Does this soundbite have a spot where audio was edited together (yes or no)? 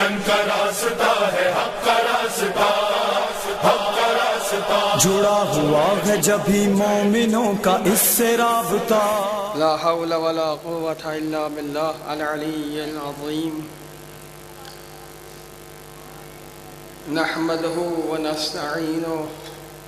yes